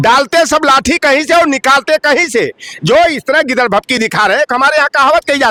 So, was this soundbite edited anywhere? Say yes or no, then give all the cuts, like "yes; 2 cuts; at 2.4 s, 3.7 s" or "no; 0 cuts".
no; 0 cuts